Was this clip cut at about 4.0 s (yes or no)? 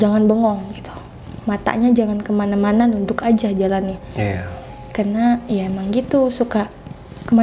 no